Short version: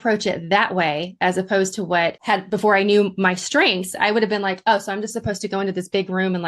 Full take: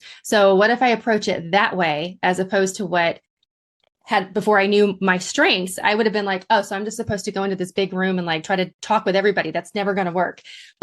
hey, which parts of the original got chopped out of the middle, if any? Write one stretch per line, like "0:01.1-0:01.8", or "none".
0:03.2-0:04.0